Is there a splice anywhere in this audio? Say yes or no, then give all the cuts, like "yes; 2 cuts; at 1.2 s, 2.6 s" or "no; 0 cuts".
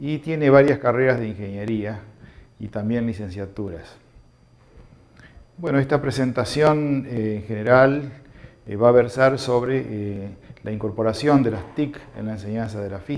no; 0 cuts